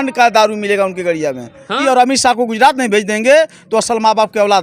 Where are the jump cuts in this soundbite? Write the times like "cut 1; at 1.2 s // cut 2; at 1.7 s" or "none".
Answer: cut 1; at 1.8 s